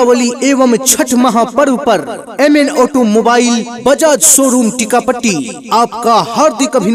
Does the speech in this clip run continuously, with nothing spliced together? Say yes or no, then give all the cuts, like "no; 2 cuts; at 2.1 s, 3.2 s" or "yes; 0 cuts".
yes; 0 cuts